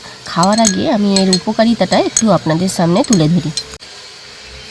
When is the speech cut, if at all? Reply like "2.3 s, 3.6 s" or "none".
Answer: 3.6 s